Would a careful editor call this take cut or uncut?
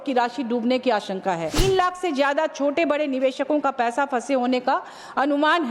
cut